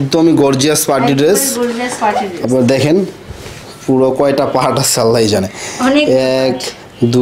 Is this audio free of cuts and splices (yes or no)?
yes